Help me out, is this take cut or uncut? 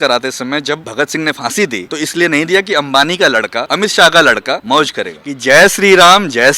cut